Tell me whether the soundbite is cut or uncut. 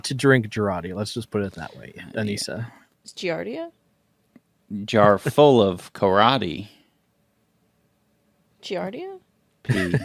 uncut